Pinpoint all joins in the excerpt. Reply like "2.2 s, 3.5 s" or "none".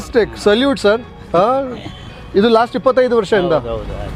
none